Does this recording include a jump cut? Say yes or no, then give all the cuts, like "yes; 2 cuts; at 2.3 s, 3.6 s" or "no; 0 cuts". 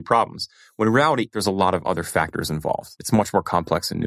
yes; 2 cuts; at 1.4 s, 2.9 s